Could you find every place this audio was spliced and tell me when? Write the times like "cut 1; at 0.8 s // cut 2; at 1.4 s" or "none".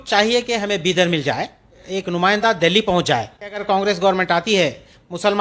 cut 1; at 1.8 s // cut 2; at 3.6 s